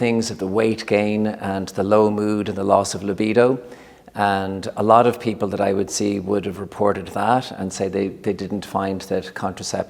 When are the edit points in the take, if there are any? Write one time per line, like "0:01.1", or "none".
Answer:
none